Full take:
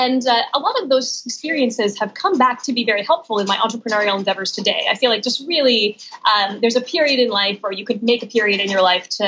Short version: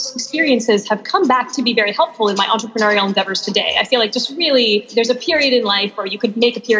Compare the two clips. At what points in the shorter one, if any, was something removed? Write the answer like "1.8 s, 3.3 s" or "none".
4.9 s